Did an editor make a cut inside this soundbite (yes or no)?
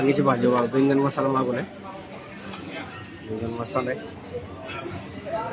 no